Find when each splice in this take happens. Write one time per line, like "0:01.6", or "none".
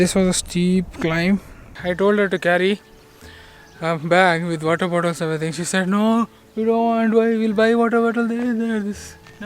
0:01.7